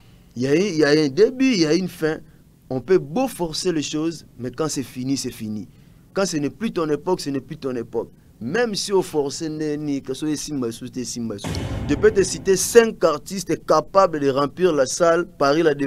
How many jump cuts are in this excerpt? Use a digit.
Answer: 1